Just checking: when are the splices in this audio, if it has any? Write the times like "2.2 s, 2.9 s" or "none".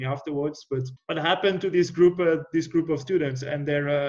0.9 s